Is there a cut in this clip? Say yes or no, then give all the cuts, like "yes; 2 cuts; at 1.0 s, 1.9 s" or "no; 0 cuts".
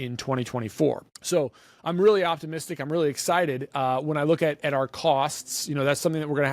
yes; 1 cut; at 1.1 s